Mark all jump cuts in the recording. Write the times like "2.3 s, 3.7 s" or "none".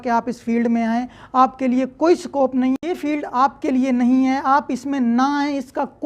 2.8 s